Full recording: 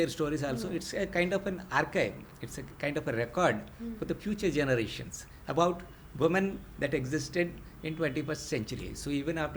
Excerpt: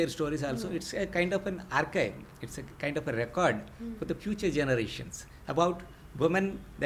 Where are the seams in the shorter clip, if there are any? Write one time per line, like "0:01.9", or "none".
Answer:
none